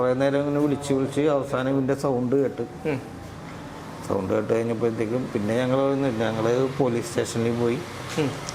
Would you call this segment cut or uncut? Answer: uncut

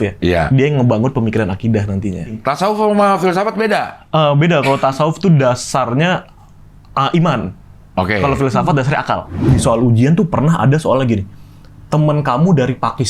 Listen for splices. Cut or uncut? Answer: cut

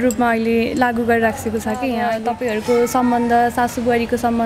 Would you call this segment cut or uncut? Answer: cut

